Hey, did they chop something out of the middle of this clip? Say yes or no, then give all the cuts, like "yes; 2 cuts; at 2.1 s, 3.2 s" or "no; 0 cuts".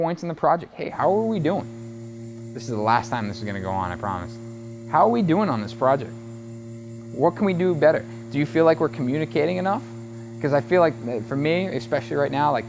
no; 0 cuts